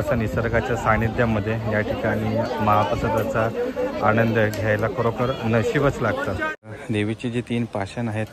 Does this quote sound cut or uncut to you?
cut